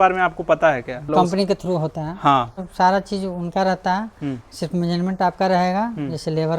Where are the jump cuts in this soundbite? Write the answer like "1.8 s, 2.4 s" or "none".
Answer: 1.1 s, 2.6 s